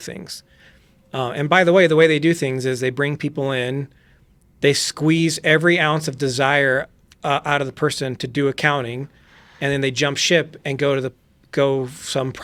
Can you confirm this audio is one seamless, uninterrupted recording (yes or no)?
yes